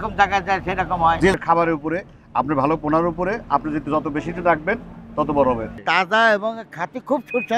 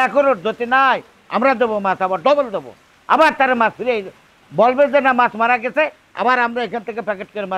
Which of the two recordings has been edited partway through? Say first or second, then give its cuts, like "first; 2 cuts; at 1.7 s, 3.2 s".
first; 2 cuts; at 1.3 s, 5.8 s